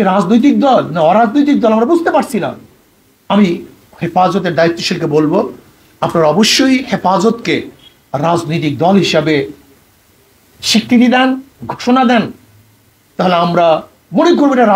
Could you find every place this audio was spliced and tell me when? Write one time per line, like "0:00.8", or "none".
none